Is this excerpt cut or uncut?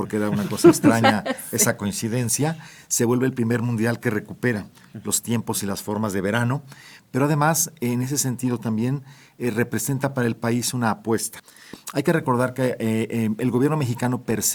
uncut